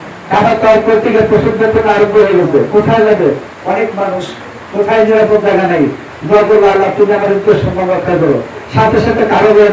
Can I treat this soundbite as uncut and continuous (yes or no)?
yes